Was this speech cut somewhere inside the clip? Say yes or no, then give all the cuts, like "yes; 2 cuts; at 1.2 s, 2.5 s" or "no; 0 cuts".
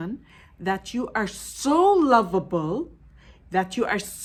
no; 0 cuts